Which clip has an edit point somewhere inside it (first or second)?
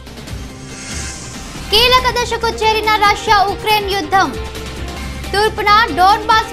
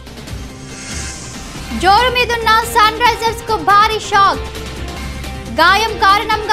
second